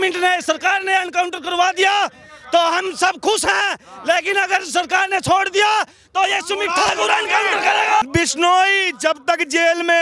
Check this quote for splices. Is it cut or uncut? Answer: cut